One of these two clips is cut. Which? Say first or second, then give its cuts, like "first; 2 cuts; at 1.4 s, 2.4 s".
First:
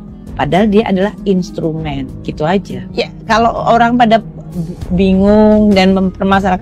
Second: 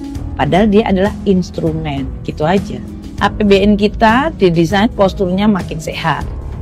first; 1 cut; at 2.8 s